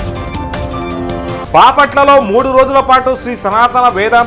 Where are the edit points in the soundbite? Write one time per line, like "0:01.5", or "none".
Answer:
0:01.4

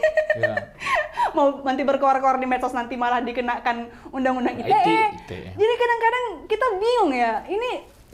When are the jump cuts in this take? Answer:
none

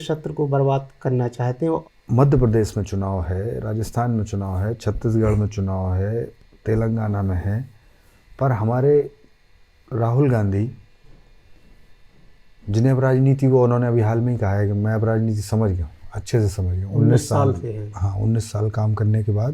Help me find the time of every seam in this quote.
0:01.8

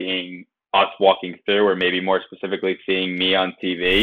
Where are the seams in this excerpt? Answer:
none

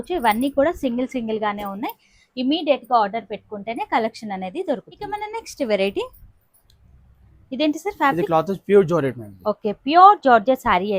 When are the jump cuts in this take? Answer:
none

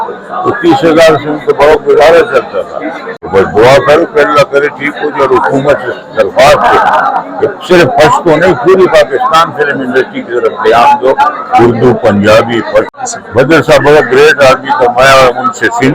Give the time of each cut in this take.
0:03.1
0:13.0

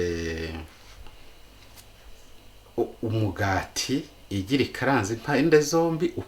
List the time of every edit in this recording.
none

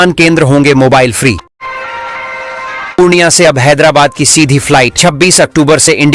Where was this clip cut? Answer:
0:01.5

